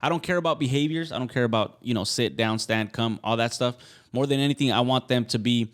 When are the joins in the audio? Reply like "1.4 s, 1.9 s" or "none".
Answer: none